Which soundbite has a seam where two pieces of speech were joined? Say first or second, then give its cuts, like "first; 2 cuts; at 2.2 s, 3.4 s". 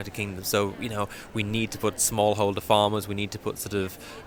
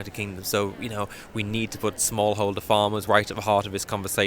second; 1 cut; at 3.0 s